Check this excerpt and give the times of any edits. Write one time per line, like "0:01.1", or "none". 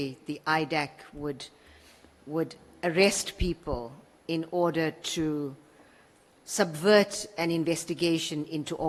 none